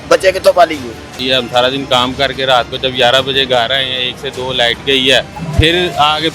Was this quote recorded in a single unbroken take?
no; 2 cuts; at 1.2 s, 5.4 s

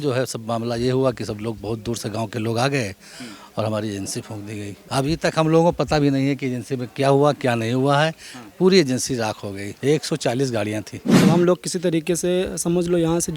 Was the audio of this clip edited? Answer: yes; 3 cuts; at 4.8 s, 9.7 s, 11.2 s

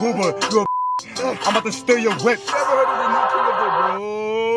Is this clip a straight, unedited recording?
no; 1 cut; at 2.5 s

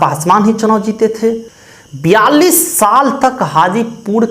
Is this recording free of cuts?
no; 1 cut; at 1.5 s

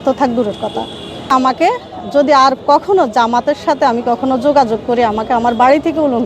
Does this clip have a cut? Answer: yes; 1 cut; at 1.2 s

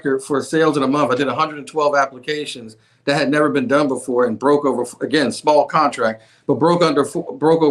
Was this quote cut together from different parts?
no; 0 cuts

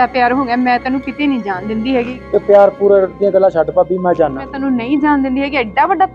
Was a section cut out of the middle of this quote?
yes; 2 cuts; at 2.2 s, 4.5 s

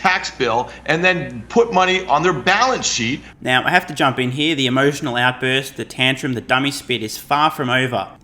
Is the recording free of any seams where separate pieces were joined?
yes; 0 cuts

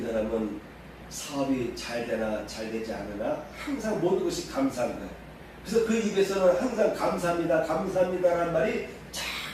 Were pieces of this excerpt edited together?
no; 0 cuts

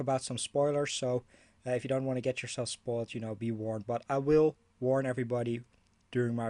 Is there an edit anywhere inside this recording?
yes; 1 cut; at 2.2 s

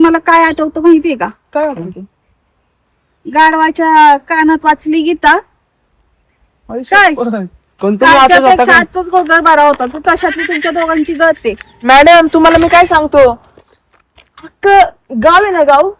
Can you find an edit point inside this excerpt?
yes; 1 cut; at 11.7 s

